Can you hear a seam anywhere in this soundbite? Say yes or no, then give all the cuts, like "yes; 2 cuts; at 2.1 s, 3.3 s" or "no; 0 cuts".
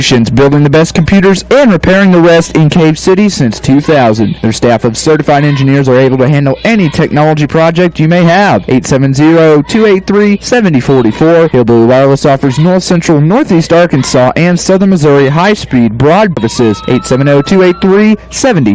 yes; 1 cut; at 16.4 s